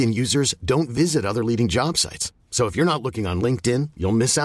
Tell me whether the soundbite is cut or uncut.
uncut